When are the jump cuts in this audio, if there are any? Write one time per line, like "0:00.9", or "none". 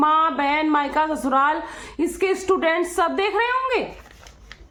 none